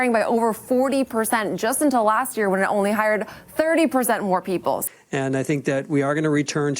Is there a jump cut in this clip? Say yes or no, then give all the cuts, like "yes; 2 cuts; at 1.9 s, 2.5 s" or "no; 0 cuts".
yes; 1 cut; at 4.8 s